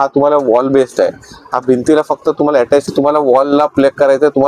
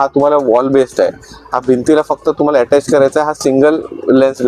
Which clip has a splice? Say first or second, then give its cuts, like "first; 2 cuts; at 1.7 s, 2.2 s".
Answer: first; 1 cut; at 2.8 s